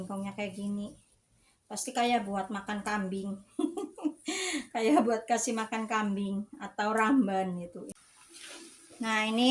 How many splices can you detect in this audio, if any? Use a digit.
1